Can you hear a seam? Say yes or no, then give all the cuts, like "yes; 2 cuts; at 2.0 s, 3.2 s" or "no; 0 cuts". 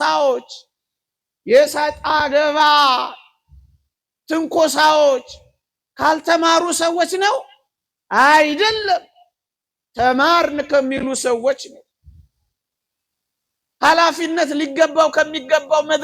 no; 0 cuts